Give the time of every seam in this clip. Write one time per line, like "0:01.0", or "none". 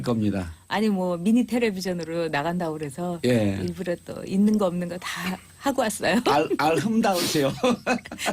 0:03.1

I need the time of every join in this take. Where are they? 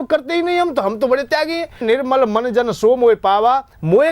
0:01.8

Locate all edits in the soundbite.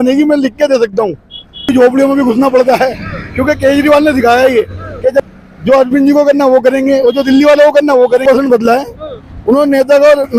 0:01.7
0:05.3
0:08.2

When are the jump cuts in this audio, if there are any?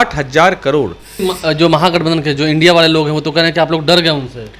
0:01.1

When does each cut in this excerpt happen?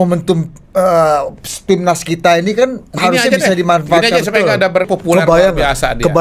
0:04.9

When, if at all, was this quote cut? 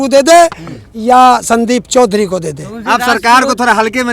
none

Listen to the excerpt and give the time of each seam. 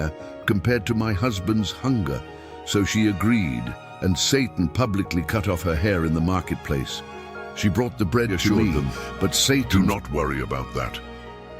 0:09.7

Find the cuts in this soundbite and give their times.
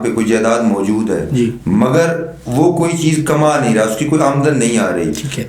none

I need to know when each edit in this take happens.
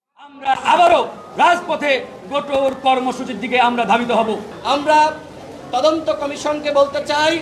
0:04.5

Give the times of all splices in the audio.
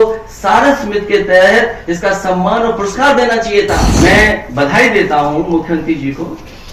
0:03.9

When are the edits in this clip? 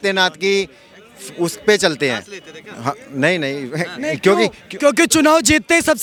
none

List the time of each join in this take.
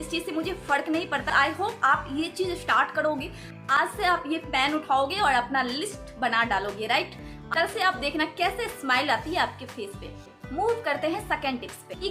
none

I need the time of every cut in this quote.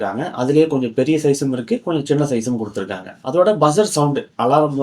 0:03.1

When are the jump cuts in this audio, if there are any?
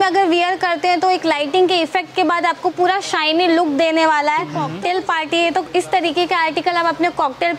0:04.6

